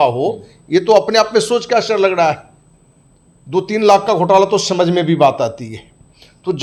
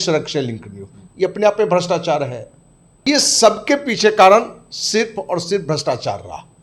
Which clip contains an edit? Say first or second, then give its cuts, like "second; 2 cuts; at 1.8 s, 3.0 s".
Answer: second; 1 cut; at 3.0 s